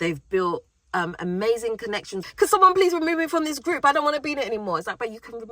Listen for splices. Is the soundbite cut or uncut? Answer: cut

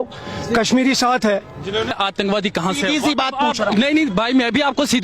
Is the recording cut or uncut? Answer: cut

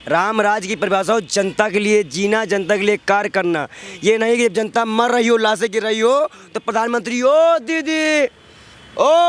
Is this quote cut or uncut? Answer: uncut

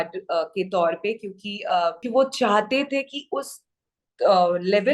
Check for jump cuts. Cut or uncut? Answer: cut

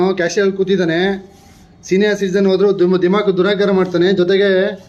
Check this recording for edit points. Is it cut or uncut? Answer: uncut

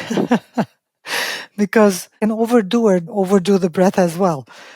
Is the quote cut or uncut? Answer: cut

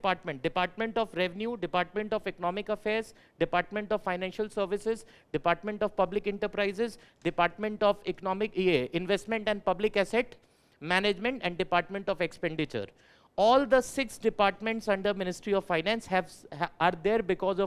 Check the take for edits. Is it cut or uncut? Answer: uncut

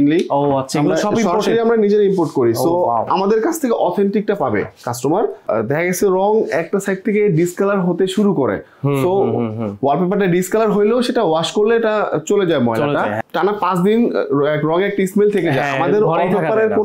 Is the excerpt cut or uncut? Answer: cut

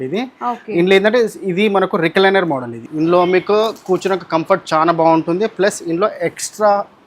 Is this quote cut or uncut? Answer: cut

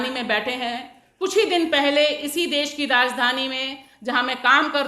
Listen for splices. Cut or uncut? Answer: uncut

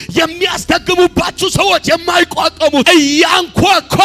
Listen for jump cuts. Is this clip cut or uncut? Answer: cut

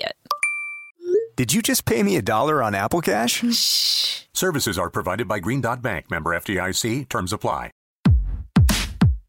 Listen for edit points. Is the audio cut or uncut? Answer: cut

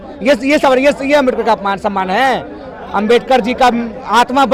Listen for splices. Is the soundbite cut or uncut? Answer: uncut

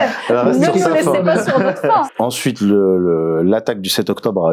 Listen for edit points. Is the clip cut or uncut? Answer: cut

